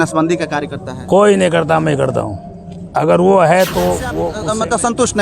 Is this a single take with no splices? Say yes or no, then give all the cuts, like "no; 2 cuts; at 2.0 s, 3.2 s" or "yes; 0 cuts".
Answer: no; 1 cut; at 4.2 s